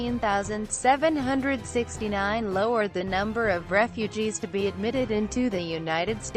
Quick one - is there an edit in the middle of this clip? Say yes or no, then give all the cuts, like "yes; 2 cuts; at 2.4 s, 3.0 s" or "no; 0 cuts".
yes; 1 cut; at 1.0 s